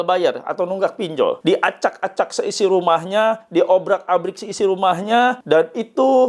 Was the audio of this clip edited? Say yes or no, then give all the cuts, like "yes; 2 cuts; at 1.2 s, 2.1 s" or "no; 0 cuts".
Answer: yes; 2 cuts; at 1.4 s, 5.4 s